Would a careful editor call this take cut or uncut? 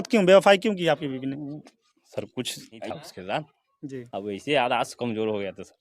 cut